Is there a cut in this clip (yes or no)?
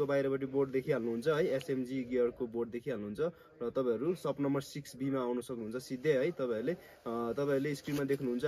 no